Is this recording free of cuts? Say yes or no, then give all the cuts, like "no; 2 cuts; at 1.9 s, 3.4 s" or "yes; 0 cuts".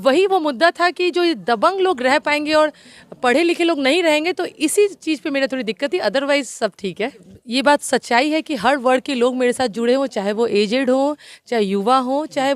no; 1 cut; at 7.4 s